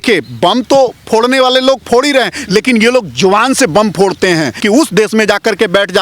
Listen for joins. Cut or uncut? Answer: cut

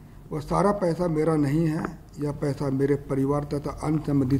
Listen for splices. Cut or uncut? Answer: uncut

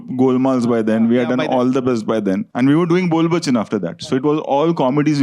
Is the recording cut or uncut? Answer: cut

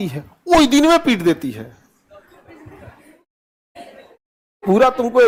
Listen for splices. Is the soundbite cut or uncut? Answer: uncut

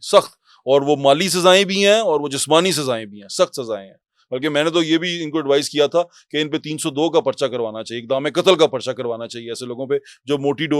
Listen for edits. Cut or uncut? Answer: uncut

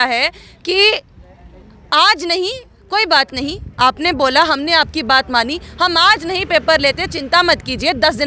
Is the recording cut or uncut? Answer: uncut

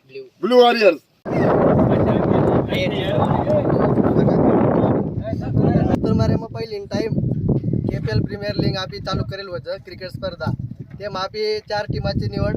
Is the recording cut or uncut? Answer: cut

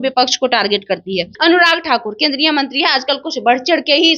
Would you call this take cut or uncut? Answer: cut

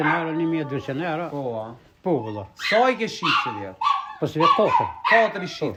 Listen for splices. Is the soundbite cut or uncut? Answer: uncut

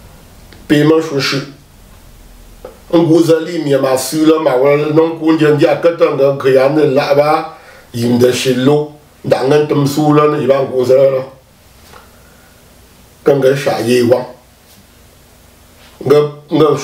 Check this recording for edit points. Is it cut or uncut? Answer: uncut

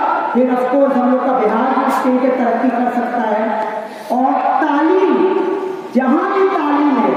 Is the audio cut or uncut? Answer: uncut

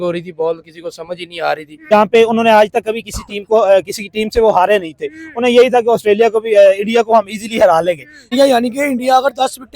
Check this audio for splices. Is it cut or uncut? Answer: cut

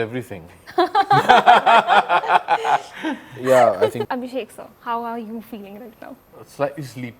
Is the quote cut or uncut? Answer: cut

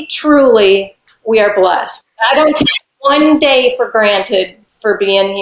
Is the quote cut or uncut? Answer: cut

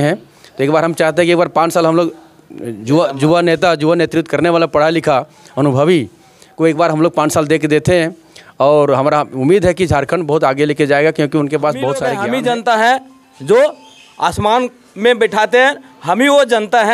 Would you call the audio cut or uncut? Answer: cut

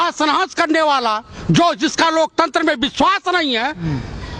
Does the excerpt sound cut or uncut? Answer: uncut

